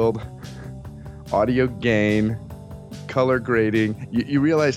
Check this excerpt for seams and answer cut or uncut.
cut